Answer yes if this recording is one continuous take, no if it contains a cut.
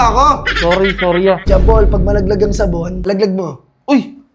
no